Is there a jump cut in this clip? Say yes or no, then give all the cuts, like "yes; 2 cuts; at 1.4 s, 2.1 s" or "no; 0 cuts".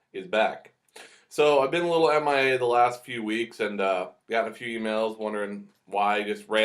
yes; 1 cut; at 5.4 s